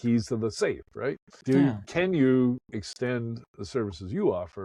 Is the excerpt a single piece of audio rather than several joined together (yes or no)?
no